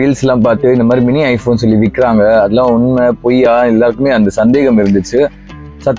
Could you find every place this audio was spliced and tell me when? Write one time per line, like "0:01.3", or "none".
none